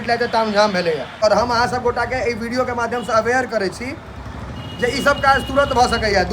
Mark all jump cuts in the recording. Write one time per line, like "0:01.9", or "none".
0:01.2